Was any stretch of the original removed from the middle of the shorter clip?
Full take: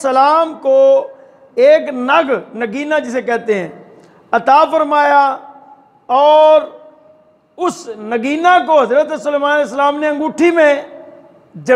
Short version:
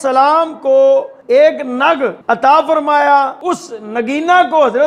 yes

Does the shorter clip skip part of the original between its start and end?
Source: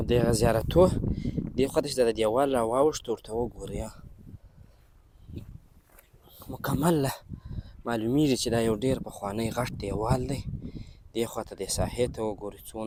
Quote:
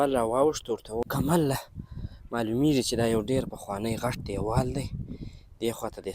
yes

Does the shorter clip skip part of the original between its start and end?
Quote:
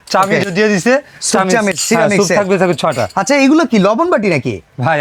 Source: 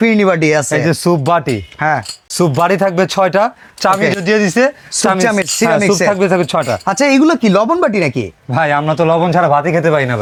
no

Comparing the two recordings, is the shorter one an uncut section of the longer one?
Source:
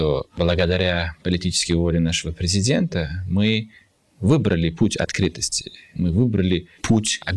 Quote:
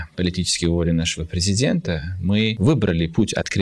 no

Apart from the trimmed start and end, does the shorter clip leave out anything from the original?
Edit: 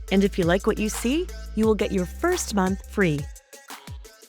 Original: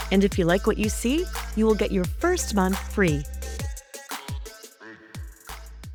yes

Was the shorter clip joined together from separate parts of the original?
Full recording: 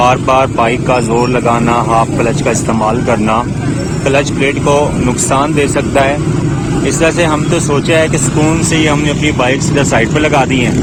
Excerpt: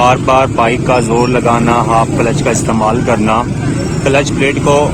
no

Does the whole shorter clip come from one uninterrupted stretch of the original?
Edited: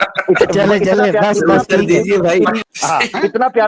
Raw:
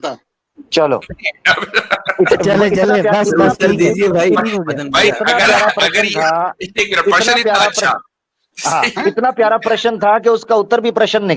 no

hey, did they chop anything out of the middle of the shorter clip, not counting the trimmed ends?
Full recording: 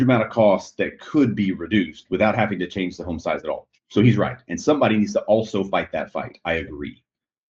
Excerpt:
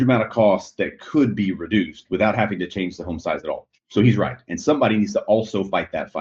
no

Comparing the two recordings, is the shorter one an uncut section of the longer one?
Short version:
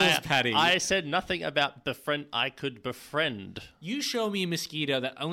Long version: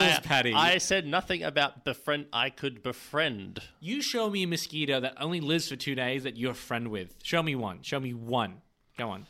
yes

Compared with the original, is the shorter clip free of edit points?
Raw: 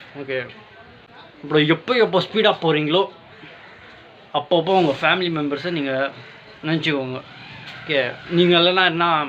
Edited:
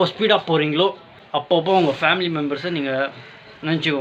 no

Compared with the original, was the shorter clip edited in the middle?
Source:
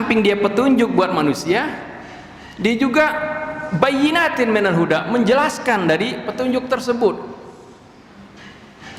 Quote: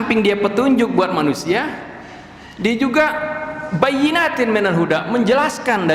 no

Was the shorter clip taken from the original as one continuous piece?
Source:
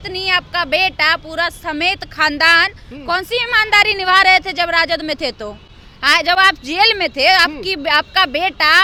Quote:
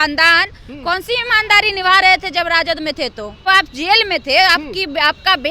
no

